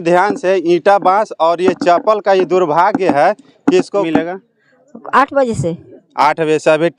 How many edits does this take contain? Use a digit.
1